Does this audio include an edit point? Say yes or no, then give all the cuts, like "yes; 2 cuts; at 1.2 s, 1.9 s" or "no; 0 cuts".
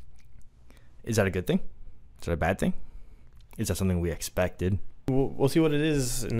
yes; 1 cut; at 5.1 s